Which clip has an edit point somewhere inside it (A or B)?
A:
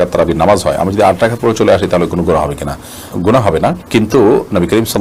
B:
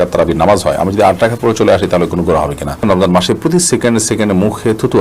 B